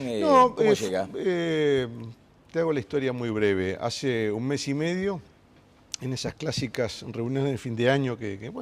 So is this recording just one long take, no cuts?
no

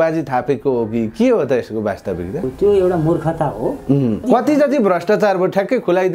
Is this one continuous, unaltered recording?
no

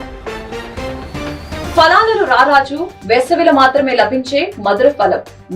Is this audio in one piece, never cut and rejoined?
yes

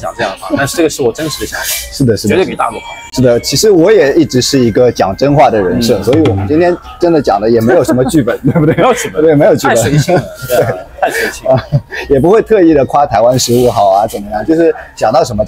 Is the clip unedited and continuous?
yes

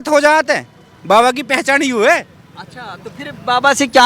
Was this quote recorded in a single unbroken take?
yes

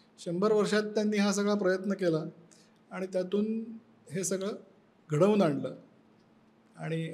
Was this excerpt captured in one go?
yes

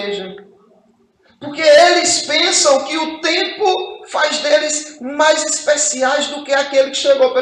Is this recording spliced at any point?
no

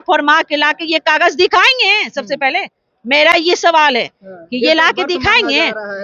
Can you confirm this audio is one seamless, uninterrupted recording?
yes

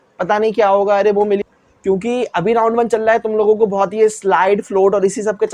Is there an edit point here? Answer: yes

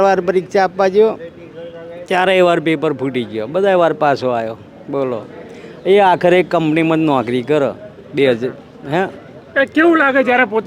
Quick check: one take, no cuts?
yes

